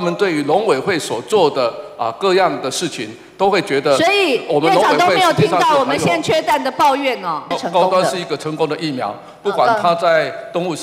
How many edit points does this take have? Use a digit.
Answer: 1